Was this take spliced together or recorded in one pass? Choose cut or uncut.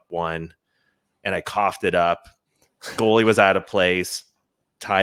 uncut